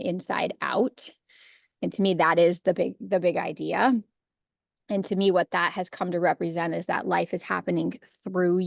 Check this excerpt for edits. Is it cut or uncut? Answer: uncut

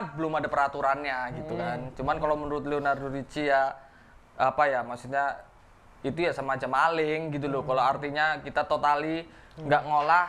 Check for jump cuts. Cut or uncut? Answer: uncut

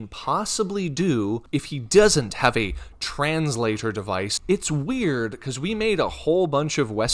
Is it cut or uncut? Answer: cut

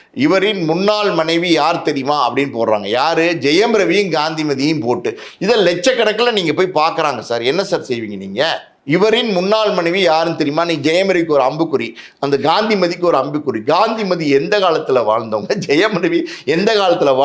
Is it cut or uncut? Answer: cut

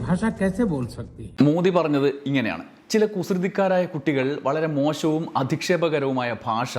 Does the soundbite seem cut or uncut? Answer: uncut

